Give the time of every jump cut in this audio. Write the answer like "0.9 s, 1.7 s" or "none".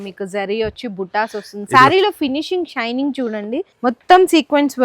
3.7 s